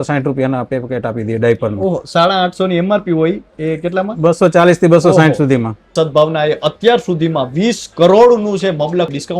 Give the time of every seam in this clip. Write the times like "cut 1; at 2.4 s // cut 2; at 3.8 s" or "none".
cut 1; at 5.8 s